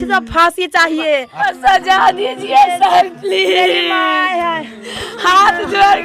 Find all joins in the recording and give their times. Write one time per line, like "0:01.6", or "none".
0:01.5